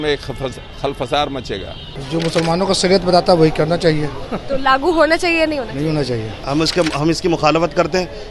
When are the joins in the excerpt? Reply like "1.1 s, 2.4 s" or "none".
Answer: 1.8 s, 6.4 s

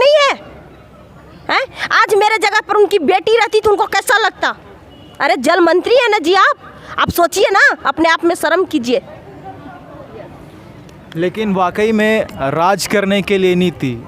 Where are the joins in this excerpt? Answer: none

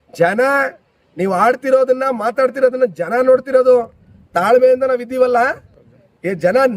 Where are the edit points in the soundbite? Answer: none

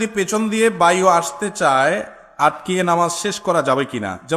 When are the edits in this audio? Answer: none

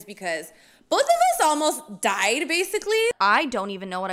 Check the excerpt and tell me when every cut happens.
3.1 s

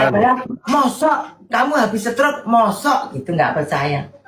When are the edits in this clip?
none

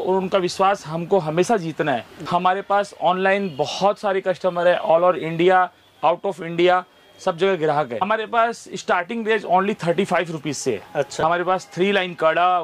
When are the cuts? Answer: 2.1 s, 8.0 s, 11.1 s

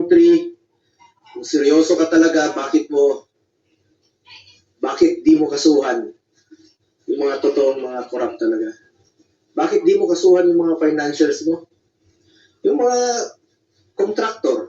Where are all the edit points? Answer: none

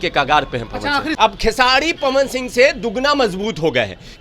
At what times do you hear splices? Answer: 1.1 s

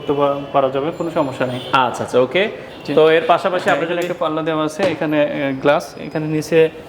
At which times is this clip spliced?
none

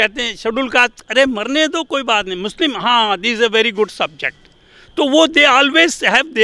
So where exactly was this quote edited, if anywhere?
none

